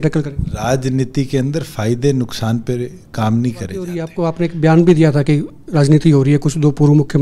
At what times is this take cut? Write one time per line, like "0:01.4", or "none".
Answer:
0:04.1